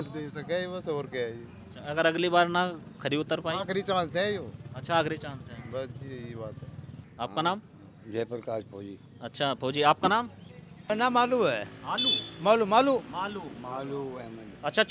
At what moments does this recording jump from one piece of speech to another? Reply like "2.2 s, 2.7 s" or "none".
none